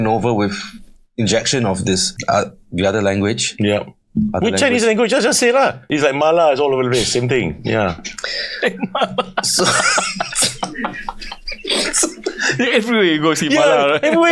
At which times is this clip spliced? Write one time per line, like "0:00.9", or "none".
0:02.1
0:05.9